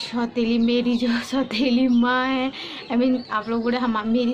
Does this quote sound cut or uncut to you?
uncut